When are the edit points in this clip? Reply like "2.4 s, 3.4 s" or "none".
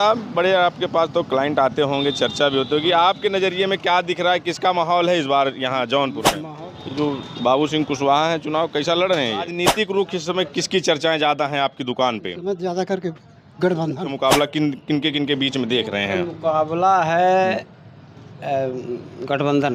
6.4 s, 9.5 s, 14.1 s